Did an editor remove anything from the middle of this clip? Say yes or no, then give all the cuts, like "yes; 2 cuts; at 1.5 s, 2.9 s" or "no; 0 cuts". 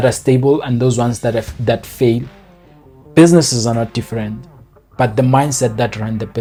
no; 0 cuts